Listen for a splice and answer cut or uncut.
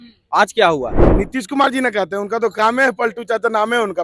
cut